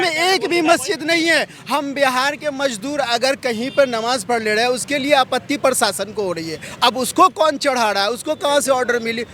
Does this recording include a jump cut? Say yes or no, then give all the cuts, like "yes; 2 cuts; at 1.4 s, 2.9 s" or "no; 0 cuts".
no; 0 cuts